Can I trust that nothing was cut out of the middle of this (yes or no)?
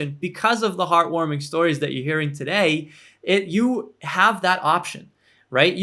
yes